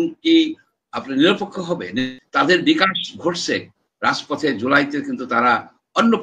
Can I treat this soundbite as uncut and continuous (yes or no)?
no